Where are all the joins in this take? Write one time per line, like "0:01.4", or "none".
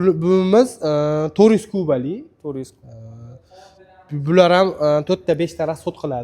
none